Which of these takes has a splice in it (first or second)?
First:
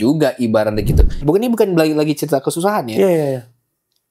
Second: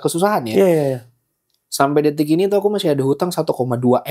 first